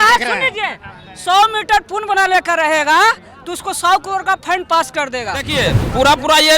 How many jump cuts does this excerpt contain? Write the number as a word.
one